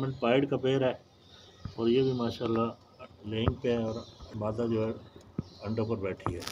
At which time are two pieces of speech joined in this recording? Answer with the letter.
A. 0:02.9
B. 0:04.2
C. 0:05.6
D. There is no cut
B